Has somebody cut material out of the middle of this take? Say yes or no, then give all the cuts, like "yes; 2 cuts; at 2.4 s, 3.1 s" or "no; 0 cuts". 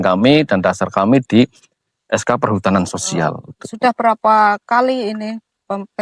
no; 0 cuts